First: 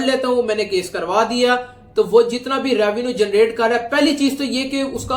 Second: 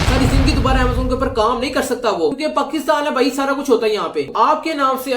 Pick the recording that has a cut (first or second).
second